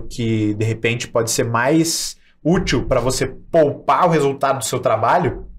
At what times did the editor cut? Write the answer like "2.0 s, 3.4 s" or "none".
none